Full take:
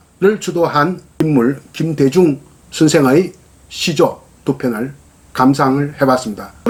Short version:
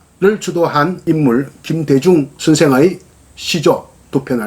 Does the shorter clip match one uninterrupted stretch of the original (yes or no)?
no